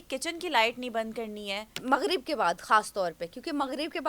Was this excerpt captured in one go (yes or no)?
no